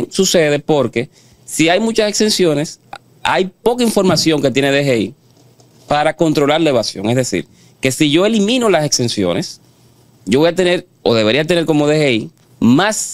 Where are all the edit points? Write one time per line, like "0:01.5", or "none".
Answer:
none